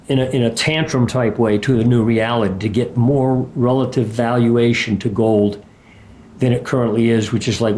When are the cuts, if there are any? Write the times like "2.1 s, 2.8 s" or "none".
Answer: none